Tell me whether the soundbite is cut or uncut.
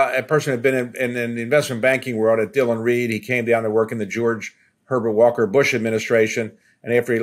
uncut